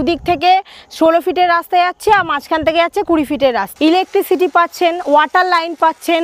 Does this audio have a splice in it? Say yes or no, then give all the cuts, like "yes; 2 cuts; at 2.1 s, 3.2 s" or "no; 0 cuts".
yes; 1 cut; at 3.7 s